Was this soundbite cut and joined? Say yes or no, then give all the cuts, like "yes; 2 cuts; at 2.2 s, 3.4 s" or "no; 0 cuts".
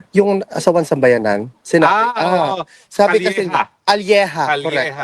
yes; 1 cut; at 1.8 s